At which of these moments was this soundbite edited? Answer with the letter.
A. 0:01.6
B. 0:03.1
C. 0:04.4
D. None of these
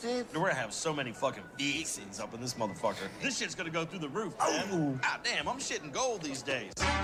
D